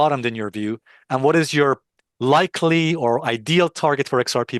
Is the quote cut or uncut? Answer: uncut